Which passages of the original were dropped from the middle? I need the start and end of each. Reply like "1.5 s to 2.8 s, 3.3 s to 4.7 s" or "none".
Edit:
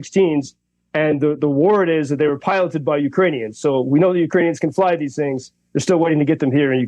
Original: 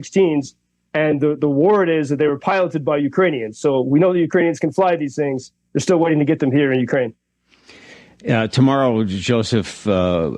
none